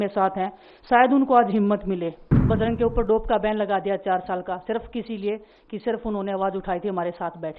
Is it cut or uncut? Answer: cut